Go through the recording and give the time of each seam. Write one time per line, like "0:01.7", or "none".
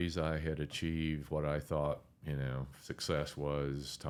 none